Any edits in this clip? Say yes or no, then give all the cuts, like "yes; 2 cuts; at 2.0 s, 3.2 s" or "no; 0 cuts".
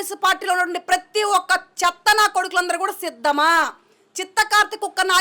no; 0 cuts